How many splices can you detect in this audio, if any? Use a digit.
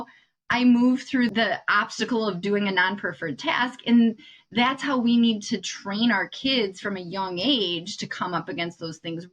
1